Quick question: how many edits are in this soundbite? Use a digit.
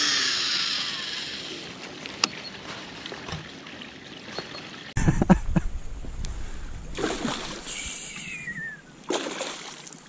1